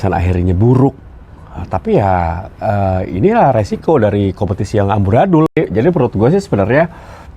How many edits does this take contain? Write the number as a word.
one